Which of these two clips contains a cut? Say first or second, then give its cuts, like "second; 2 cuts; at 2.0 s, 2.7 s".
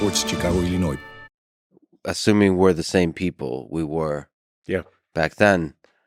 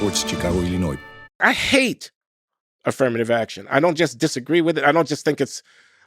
second; 1 cut; at 1.4 s